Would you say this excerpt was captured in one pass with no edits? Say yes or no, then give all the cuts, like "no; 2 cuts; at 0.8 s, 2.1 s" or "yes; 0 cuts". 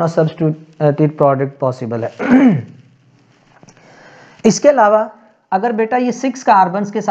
yes; 0 cuts